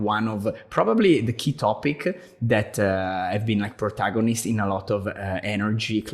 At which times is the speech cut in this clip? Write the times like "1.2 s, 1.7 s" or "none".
none